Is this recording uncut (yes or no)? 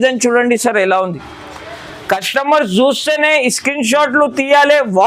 yes